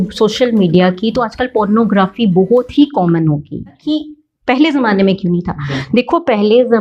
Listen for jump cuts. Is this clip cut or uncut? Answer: cut